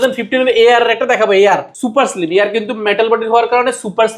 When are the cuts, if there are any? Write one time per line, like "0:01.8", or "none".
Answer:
0:01.7